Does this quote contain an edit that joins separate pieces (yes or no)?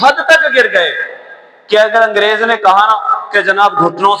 no